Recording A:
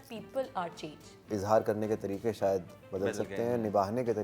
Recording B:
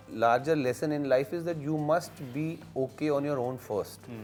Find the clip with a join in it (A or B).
A